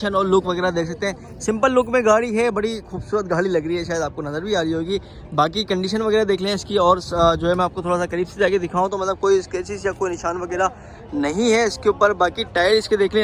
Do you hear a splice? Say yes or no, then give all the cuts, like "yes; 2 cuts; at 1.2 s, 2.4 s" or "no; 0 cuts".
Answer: no; 0 cuts